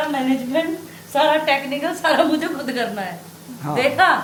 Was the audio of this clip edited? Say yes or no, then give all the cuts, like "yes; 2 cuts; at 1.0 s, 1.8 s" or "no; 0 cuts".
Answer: no; 0 cuts